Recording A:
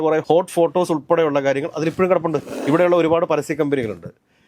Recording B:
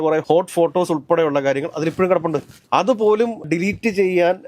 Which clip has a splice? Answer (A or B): A